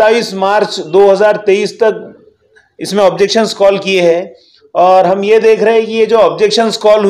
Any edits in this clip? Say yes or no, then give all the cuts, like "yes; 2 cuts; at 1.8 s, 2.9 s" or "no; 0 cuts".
no; 0 cuts